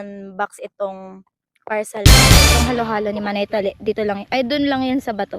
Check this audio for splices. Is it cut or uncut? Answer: cut